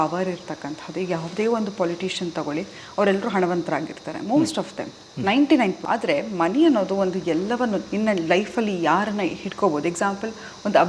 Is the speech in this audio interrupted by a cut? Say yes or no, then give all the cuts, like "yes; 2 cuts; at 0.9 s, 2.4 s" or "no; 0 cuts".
no; 0 cuts